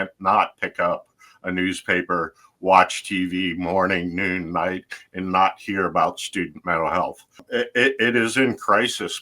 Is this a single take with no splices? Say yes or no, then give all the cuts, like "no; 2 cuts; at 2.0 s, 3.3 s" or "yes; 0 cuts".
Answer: no; 1 cut; at 7.4 s